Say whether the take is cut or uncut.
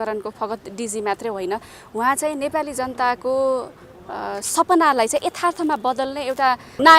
uncut